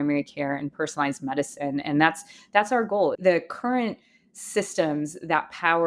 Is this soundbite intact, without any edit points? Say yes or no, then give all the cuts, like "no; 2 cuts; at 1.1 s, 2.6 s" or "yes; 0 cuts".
no; 1 cut; at 3.1 s